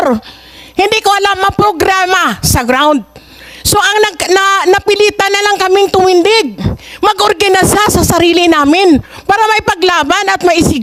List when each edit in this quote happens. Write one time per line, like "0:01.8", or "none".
none

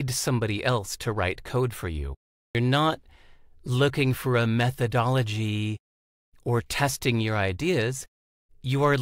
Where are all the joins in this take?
0:02.5

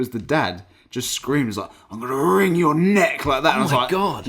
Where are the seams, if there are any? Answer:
none

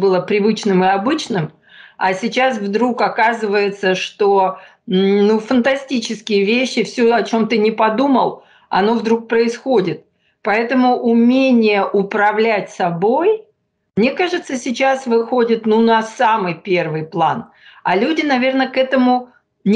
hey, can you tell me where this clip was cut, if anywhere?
none

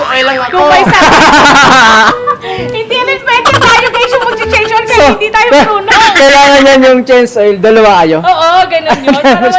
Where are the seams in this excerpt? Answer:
none

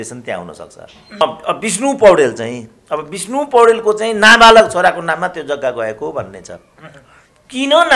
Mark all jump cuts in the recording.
0:01.2

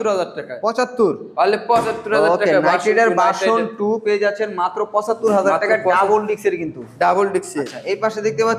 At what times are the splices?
none

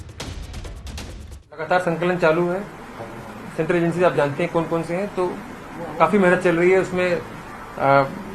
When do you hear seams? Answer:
none

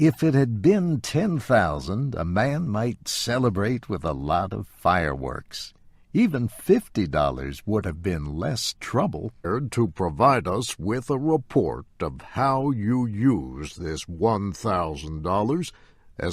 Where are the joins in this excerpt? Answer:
none

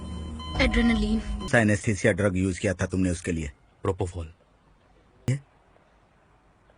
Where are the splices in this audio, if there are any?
0:01.5
0:05.3

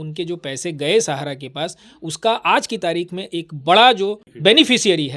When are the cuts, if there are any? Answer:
0:04.3

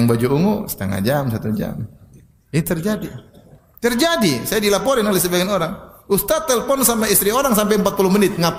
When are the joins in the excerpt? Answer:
none

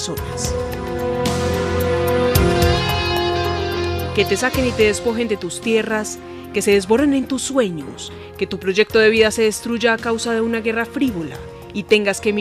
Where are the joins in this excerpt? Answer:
0:10.8

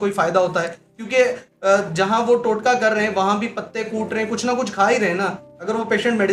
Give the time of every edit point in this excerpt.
none

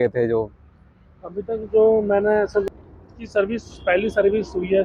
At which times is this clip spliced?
0:02.7

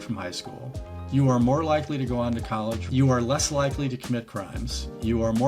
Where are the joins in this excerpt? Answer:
0:02.9

